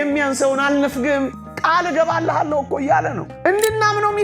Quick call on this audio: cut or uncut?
cut